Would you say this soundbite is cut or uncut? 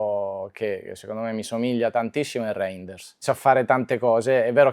cut